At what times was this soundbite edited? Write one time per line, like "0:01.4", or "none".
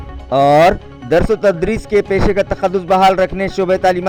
none